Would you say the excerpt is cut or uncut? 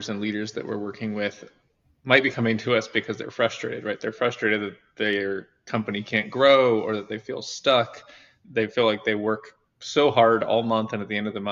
uncut